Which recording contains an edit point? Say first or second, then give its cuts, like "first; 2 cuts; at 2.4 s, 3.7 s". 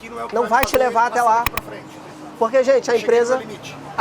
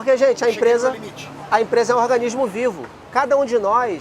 second; 1 cut; at 2.9 s